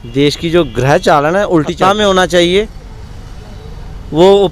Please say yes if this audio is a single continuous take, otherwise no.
no